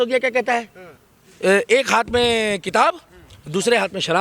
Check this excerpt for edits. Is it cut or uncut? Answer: uncut